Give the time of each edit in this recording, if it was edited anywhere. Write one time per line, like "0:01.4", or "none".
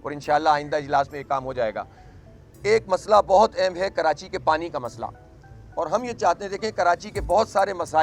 none